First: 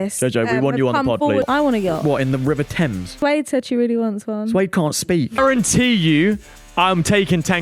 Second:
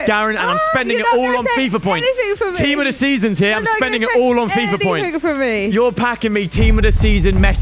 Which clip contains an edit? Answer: first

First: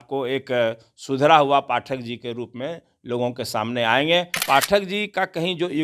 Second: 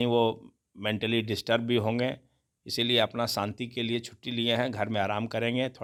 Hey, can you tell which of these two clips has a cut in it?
first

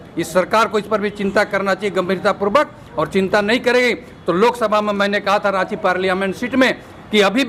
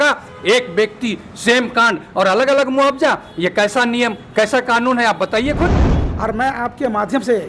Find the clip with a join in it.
second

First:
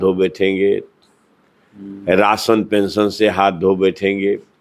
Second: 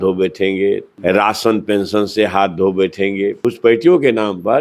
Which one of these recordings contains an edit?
second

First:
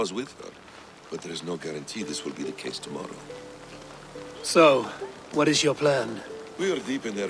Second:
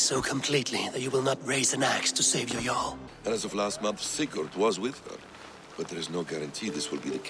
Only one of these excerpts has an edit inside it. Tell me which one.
second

